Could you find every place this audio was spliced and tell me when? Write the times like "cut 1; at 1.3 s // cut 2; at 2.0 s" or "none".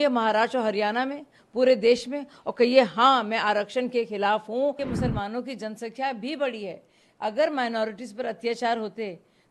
cut 1; at 4.8 s